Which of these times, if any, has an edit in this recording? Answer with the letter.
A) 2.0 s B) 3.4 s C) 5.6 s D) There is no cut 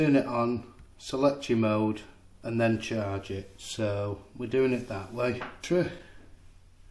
C